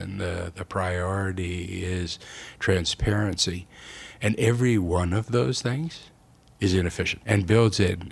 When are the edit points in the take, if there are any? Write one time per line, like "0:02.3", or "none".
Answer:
0:07.2